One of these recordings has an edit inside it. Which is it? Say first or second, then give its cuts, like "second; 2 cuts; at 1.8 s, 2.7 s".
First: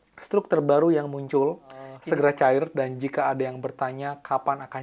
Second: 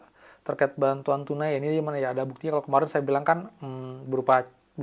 first; 1 cut; at 1.9 s